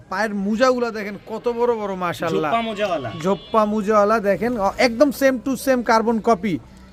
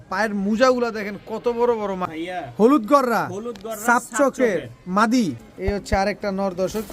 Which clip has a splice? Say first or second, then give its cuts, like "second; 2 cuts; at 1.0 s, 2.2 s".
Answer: second; 2 cuts; at 2.1 s, 5.5 s